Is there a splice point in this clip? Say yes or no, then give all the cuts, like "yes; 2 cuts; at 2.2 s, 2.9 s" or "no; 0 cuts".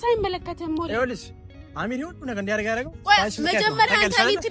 no; 0 cuts